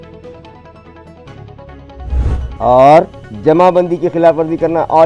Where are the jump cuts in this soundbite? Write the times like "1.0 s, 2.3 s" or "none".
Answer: 2.5 s